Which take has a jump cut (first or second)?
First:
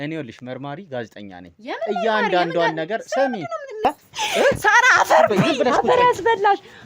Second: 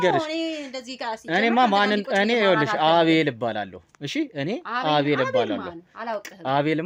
first